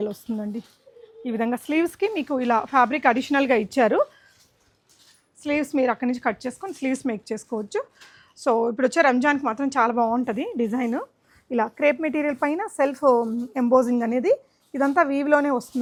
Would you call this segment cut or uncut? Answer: uncut